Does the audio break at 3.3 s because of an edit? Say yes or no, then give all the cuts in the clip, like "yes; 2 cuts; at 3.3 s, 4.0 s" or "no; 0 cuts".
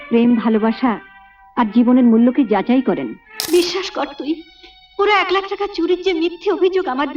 yes; 1 cut; at 3.3 s